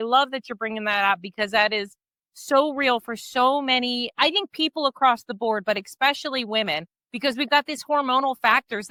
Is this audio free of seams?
yes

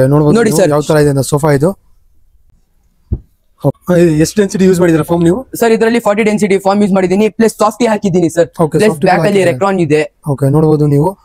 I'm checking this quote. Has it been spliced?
no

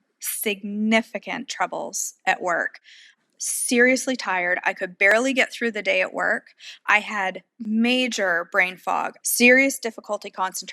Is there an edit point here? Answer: yes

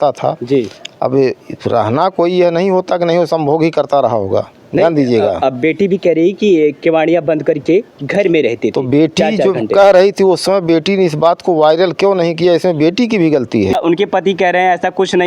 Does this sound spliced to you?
yes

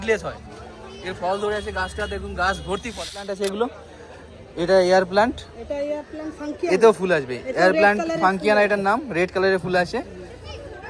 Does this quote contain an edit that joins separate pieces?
yes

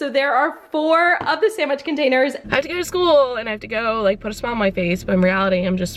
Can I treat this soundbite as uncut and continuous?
no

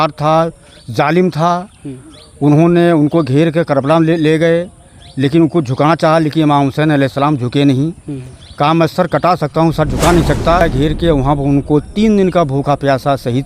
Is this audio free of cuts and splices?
no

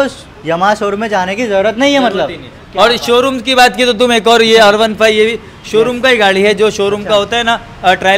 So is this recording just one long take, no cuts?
yes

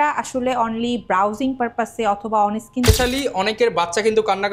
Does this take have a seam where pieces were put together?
yes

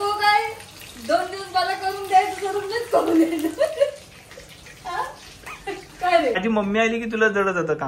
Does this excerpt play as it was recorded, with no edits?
no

